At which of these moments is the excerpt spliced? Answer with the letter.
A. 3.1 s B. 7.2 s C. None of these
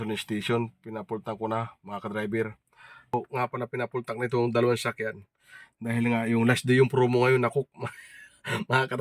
A